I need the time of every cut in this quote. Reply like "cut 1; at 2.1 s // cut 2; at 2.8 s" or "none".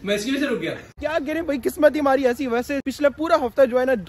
cut 1; at 1.0 s // cut 2; at 2.8 s